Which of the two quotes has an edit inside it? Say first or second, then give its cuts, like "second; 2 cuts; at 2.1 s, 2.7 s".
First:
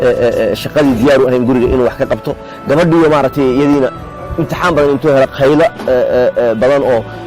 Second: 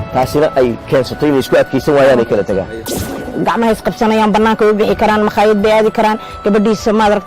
second; 1 cut; at 2.9 s